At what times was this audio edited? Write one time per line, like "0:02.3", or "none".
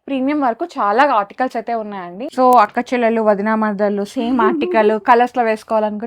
0:02.2